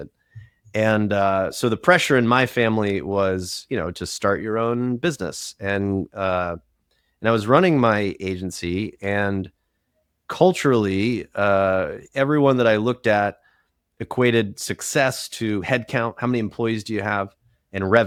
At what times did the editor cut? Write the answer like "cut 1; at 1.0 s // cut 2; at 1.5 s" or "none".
none